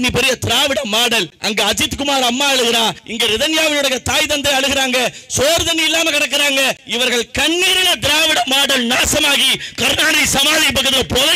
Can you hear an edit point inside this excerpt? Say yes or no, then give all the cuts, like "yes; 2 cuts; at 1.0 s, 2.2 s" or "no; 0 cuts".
yes; 3 cuts; at 1.3 s, 3.0 s, 6.8 s